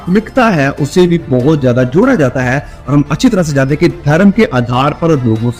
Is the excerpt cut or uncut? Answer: uncut